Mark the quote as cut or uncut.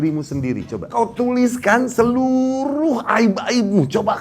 cut